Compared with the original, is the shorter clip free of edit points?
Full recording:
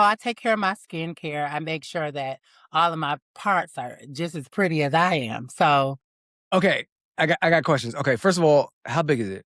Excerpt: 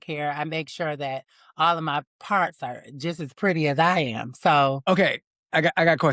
no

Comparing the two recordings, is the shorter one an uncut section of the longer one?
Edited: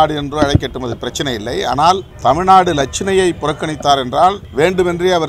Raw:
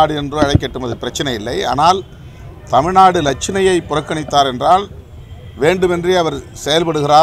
no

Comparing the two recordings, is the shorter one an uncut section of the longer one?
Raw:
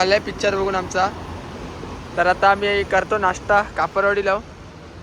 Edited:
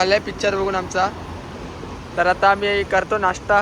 yes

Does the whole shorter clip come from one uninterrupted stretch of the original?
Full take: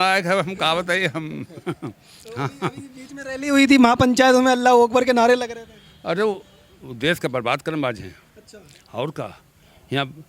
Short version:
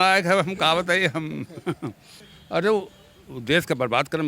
no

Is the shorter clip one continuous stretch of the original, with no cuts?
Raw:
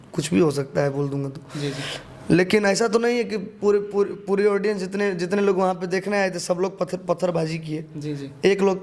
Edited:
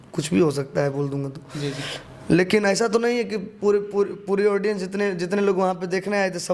yes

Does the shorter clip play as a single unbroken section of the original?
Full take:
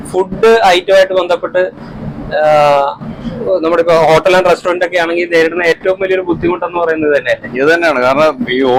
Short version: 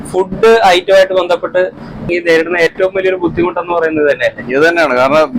no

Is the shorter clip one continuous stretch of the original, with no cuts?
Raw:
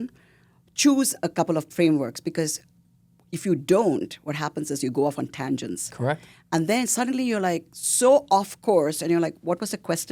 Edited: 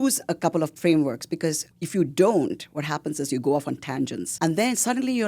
no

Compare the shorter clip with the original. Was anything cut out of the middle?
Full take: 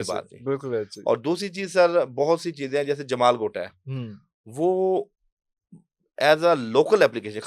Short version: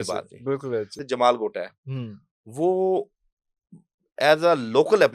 yes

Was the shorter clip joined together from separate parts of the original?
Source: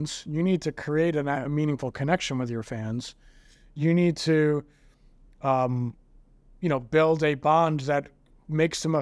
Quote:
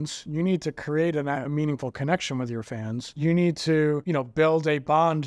yes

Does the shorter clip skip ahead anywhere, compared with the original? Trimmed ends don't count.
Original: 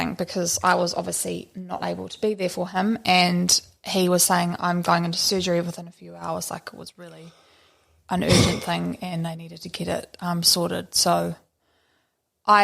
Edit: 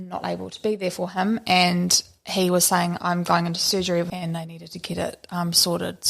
yes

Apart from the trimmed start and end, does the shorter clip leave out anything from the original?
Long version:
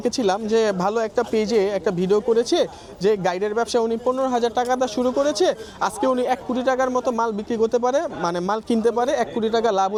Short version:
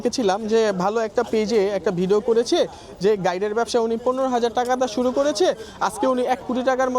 no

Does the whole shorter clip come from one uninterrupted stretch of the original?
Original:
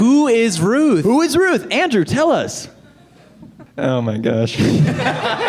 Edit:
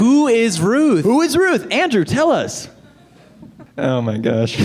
yes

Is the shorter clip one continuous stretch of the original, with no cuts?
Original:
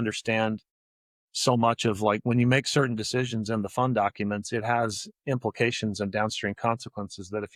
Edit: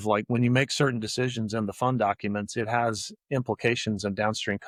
yes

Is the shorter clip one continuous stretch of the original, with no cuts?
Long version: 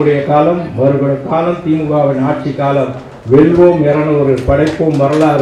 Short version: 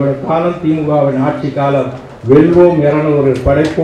yes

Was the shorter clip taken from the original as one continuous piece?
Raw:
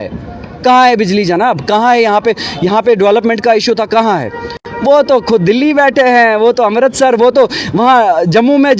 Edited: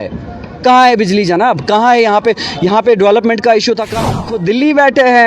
no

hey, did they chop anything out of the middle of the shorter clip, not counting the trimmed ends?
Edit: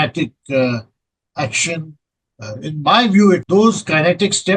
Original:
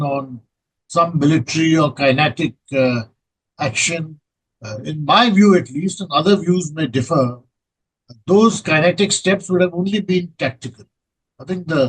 yes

